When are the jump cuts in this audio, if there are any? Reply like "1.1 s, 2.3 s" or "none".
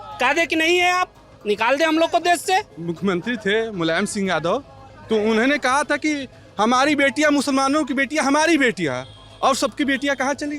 2.7 s